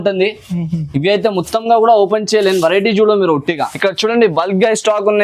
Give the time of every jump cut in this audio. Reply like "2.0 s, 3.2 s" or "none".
3.7 s